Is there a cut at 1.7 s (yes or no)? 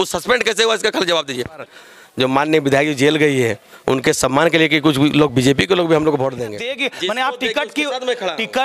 yes